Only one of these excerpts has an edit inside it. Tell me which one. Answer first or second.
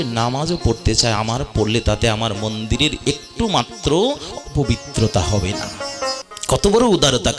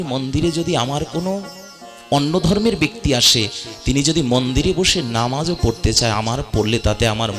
first